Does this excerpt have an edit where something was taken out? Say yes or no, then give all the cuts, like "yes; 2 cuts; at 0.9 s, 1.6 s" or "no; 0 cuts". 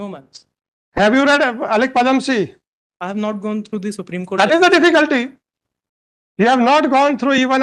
no; 0 cuts